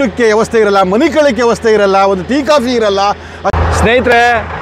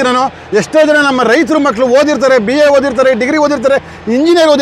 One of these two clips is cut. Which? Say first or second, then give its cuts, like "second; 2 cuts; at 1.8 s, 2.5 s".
first; 1 cut; at 3.5 s